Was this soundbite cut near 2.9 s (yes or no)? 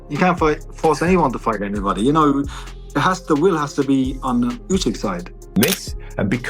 no